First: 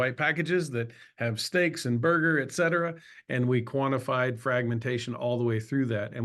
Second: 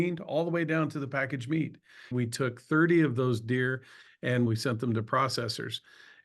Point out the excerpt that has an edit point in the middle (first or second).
second